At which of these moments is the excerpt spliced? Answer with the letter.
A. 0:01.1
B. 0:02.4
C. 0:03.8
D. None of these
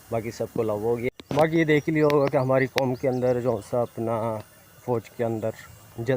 A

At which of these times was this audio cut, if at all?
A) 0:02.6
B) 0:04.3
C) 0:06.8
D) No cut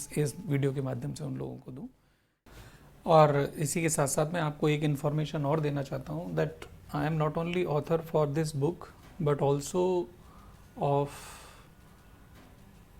A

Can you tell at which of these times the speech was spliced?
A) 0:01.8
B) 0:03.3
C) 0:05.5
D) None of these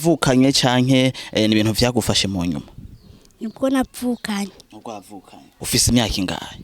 C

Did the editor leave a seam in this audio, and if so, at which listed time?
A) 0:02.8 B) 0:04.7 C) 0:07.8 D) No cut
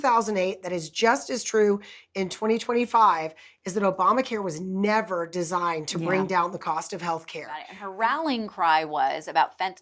C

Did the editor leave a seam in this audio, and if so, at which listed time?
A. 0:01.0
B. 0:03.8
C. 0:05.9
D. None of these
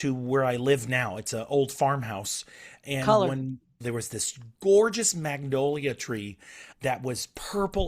B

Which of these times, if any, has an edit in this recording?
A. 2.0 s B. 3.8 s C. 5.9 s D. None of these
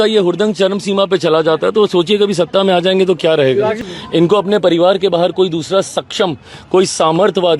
B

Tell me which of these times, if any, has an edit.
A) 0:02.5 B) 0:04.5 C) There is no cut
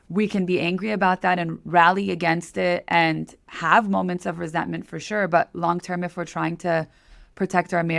C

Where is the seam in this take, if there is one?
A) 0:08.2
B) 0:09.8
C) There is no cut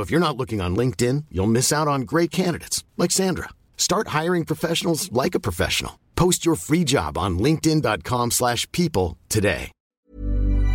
B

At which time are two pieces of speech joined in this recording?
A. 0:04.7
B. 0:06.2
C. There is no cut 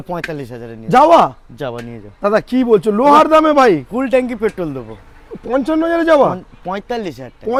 C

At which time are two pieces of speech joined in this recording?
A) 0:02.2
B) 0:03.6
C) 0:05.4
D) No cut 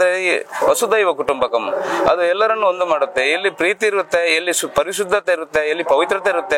D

